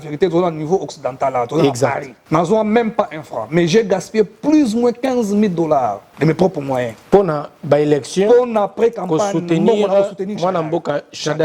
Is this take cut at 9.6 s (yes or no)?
no